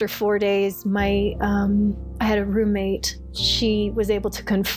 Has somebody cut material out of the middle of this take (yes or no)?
no